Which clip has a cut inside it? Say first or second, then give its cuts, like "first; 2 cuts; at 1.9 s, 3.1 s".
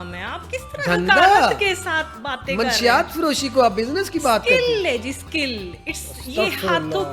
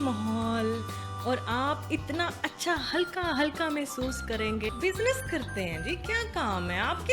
second; 1 cut; at 4.7 s